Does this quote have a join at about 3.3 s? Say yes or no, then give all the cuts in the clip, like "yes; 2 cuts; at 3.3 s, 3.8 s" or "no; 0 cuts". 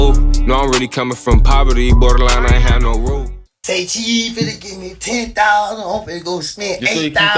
yes; 1 cut; at 3.3 s